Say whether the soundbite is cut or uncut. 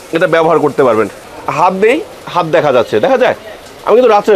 cut